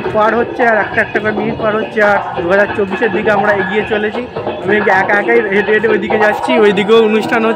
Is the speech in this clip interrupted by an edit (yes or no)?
no